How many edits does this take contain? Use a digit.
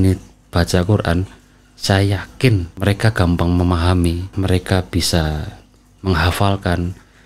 2